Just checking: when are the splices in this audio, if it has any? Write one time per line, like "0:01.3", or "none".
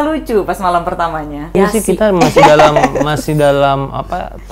0:01.5